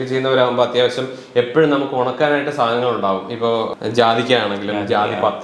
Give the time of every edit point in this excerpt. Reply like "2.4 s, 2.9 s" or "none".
3.7 s